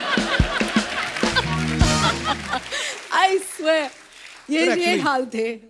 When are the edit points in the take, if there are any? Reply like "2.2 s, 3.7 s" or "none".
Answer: none